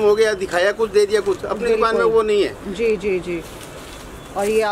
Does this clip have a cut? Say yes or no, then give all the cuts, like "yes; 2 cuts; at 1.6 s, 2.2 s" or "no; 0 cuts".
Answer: no; 0 cuts